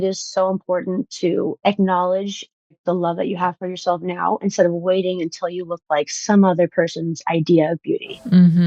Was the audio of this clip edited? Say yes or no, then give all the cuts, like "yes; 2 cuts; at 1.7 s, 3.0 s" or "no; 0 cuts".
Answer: no; 0 cuts